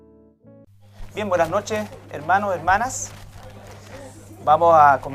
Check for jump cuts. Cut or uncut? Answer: uncut